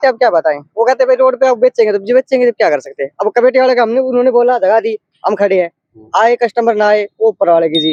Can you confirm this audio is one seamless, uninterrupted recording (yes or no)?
yes